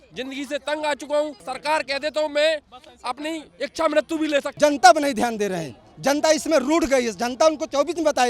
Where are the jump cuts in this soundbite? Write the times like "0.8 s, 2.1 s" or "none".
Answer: 1.4 s, 4.5 s